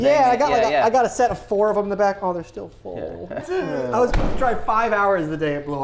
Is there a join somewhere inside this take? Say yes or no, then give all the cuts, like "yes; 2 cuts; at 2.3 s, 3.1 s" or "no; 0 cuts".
yes; 1 cut; at 3.4 s